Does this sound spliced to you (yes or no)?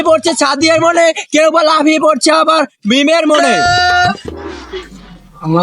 yes